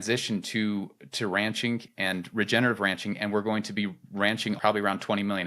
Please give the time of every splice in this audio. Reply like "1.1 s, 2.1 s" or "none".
4.6 s